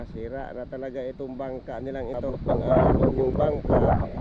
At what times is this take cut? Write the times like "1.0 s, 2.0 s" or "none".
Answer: 2.3 s